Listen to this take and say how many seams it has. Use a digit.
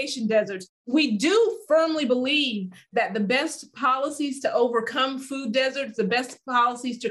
0